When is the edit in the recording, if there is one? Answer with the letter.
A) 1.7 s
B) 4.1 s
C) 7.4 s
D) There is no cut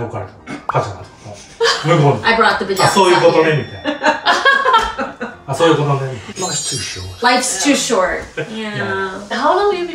D